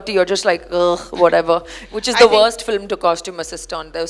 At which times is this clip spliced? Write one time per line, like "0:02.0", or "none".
0:01.8